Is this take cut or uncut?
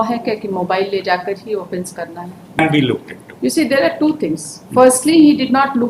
cut